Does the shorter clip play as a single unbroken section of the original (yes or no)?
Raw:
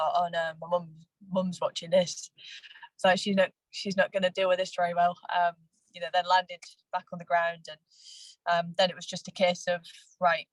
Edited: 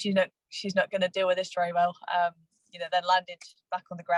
yes